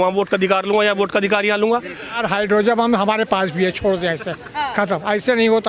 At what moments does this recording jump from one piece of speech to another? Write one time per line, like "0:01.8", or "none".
0:02.1